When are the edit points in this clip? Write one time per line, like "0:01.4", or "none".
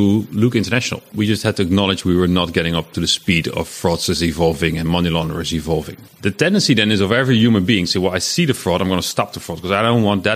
0:01.1
0:06.0